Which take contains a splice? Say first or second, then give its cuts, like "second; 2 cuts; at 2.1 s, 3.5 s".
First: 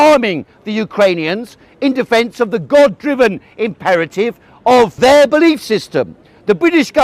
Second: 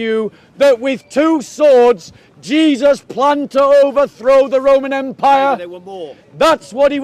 first; 1 cut; at 4.9 s